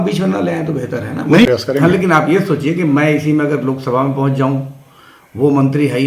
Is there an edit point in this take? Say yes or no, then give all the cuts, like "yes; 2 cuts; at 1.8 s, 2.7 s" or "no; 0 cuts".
yes; 1 cut; at 1.5 s